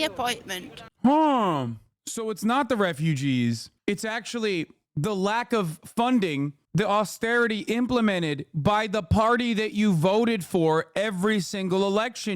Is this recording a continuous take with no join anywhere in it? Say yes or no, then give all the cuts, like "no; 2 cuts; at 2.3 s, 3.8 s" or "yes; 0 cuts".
yes; 0 cuts